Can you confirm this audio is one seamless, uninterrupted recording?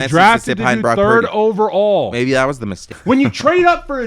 no; 1 cut; at 2.9 s

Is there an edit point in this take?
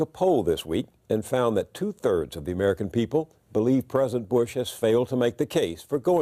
no; 0 cuts

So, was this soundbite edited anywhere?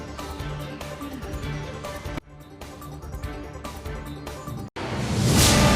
yes; 1 cut; at 4.7 s

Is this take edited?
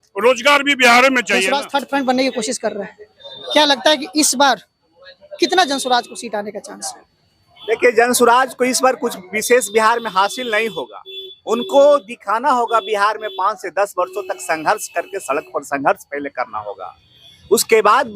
yes; 1 cut; at 1.5 s

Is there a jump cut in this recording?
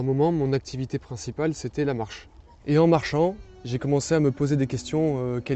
no; 0 cuts

